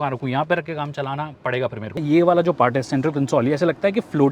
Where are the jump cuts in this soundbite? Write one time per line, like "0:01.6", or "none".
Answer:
0:02.0

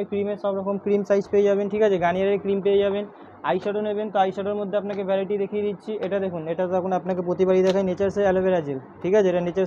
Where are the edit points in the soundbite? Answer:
none

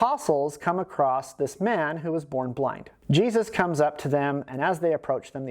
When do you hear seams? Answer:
0:02.9

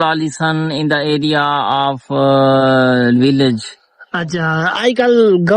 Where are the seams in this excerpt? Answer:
none

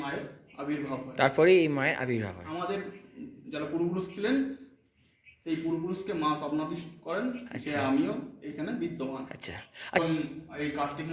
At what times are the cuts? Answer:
0:10.0

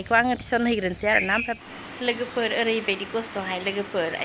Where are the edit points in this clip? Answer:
0:01.5

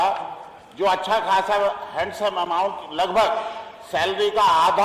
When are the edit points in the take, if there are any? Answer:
none

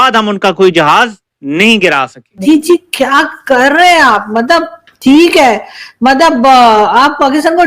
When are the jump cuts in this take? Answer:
0:02.2

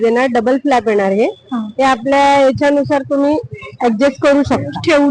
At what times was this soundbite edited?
none

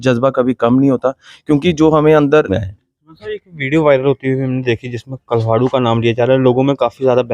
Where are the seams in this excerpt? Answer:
0:02.5

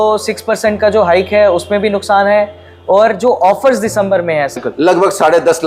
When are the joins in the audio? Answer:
0:04.5

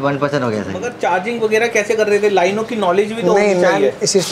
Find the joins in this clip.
0:00.9

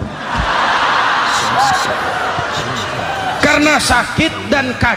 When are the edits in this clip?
none

